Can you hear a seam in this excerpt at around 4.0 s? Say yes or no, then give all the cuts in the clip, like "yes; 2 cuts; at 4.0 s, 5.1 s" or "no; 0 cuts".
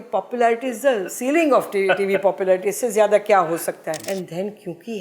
yes; 1 cut; at 4.0 s